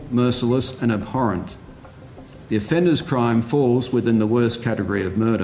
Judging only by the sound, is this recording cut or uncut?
uncut